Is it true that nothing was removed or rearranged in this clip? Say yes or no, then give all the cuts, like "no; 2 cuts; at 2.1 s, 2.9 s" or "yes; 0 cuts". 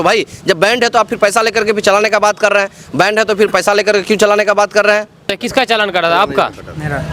no; 1 cut; at 5.4 s